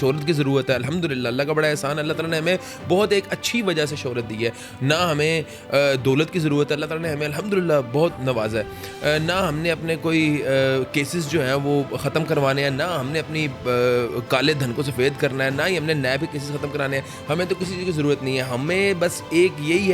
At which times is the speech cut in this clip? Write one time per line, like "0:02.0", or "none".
none